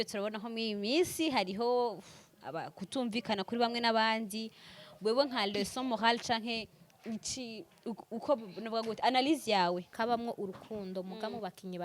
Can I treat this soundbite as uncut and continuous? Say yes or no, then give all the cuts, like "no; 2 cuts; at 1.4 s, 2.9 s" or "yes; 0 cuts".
no; 1 cut; at 9.9 s